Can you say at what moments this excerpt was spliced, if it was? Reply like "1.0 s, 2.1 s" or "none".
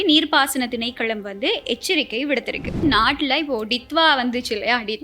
2.8 s